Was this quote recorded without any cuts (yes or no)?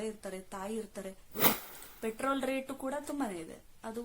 no